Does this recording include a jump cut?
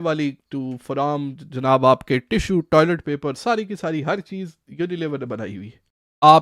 no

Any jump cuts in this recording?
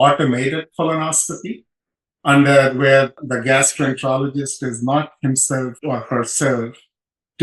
yes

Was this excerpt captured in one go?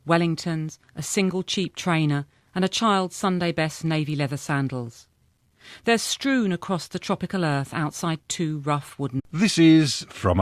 yes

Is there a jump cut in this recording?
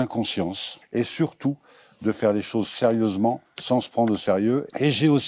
no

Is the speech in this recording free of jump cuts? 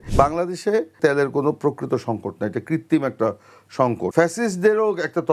no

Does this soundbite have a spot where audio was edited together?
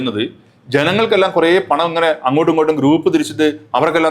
no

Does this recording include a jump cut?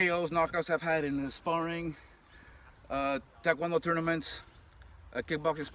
no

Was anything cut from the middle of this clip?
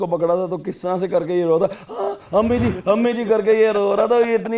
no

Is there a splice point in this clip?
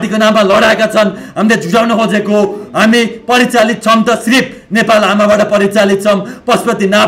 no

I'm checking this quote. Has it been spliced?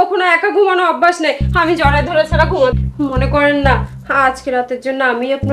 yes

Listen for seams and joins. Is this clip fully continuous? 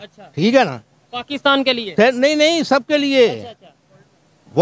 yes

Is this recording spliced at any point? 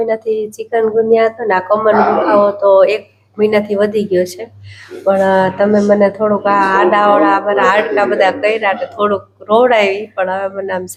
no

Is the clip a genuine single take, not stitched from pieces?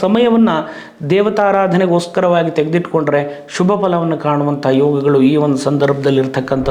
yes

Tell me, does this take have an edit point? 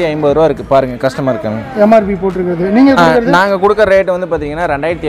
no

